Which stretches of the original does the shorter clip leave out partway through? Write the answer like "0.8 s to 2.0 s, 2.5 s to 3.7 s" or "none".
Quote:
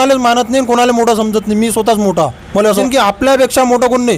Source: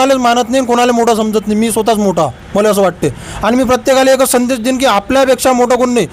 2.8 s to 4.7 s